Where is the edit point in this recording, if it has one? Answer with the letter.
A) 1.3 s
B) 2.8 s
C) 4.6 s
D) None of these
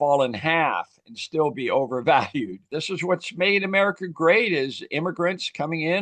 B